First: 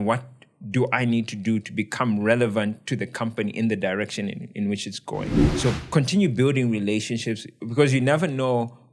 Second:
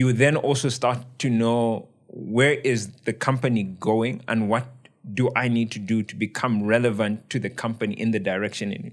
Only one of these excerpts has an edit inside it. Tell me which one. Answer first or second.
first